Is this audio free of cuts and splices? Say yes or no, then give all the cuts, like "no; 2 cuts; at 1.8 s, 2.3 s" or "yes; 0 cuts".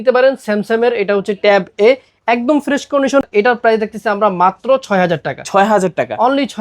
no; 1 cut; at 3.2 s